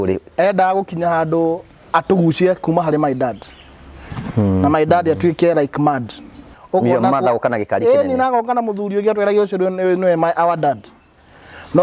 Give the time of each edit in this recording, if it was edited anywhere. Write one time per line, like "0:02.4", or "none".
0:06.5